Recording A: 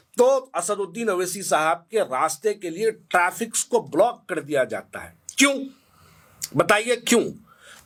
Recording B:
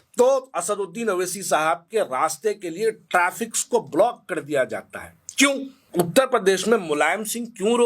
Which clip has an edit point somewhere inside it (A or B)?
B